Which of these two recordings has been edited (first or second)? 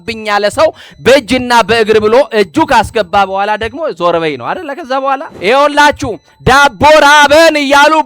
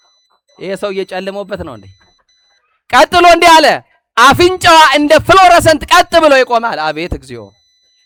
first